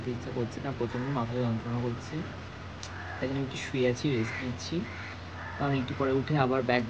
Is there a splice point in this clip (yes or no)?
no